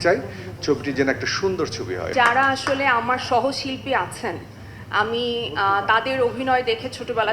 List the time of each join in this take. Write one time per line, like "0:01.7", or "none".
0:02.1